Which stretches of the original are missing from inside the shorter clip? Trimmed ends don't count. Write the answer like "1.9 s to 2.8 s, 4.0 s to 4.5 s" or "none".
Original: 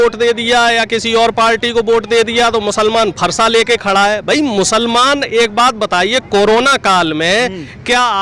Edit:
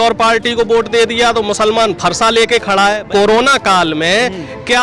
4.2 s to 6.2 s

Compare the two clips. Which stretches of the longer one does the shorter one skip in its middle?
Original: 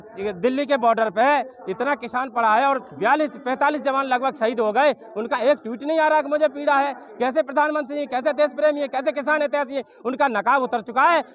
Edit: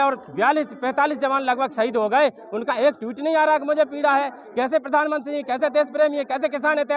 none

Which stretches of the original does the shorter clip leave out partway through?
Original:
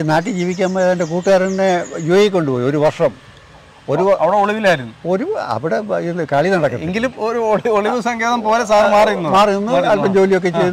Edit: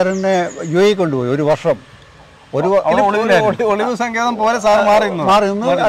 4.7 s to 7.5 s

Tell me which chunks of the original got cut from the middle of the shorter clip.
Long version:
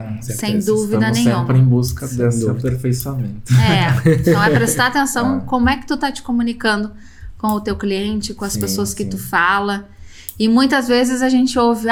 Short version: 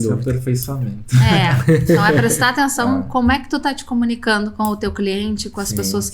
6.9 s to 7.4 s

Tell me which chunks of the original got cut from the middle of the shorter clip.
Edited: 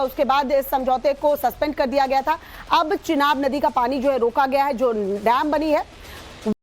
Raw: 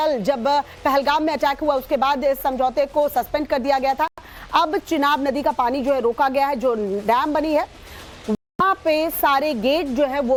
4.2 s to 4.3 s

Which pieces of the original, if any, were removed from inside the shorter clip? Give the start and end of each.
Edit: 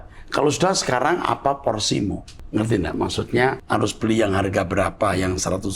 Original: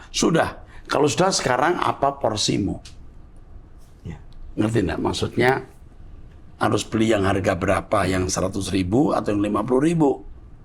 2.9 s to 4.4 s, 5.7 s to 6.5 s

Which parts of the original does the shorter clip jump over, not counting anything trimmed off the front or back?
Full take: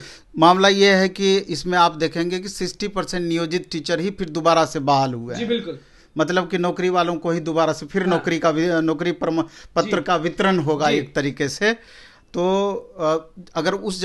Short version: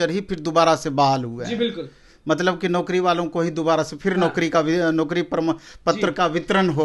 none

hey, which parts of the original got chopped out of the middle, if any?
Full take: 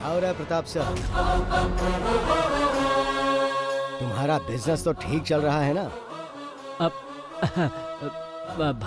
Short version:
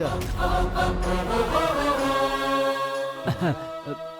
3.9 s to 7.3 s

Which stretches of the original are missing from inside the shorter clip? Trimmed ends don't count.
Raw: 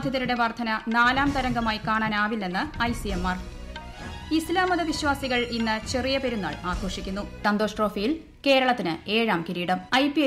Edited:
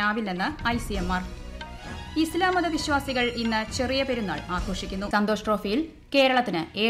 7.2 s to 7.4 s

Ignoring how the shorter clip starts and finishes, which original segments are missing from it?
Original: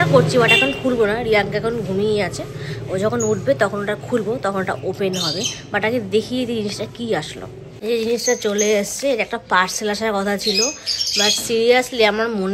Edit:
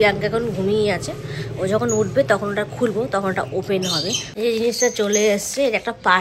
5.5 s to 7.7 s

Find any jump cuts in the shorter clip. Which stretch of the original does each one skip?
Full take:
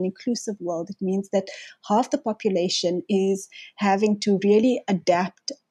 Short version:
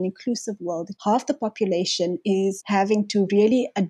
0.9 s to 1.7 s, 3.5 s to 3.7 s

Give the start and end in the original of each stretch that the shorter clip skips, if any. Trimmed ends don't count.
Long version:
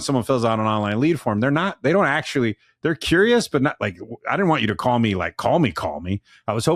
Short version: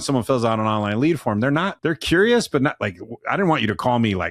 1.7 s to 2.7 s

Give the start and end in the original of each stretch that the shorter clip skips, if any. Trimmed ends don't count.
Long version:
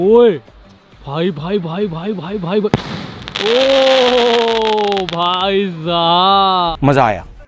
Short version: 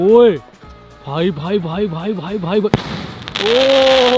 none

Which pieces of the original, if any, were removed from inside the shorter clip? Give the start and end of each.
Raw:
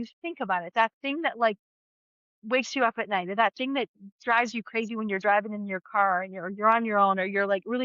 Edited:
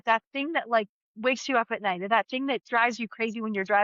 1.7 s to 2.3 s, 3.9 s to 4.2 s

